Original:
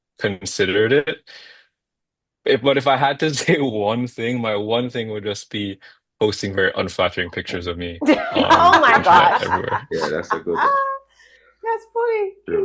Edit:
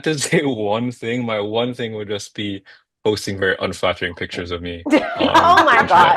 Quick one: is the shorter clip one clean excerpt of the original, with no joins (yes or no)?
yes